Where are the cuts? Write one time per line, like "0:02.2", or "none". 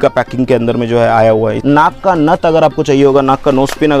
0:01.6